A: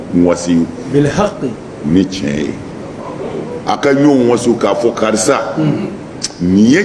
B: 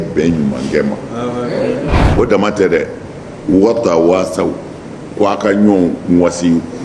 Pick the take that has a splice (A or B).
B